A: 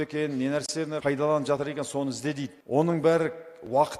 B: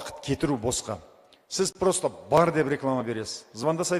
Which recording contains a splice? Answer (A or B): A